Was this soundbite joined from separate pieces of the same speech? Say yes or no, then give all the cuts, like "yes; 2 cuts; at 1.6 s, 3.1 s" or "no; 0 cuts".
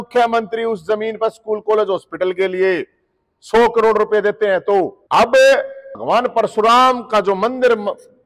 no; 0 cuts